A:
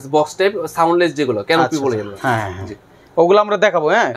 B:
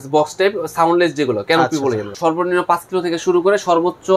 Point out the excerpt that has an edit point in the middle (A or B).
B